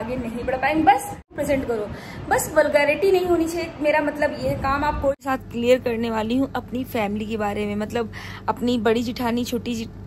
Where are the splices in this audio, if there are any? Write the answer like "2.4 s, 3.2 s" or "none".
1.3 s, 5.2 s